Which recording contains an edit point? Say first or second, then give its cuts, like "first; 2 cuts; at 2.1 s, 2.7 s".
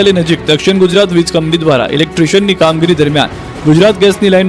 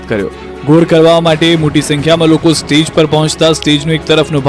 first; 1 cut; at 0.9 s